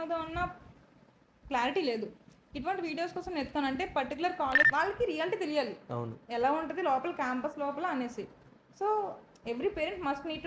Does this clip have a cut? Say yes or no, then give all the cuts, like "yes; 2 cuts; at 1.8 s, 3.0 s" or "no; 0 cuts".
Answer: yes; 1 cut; at 4.6 s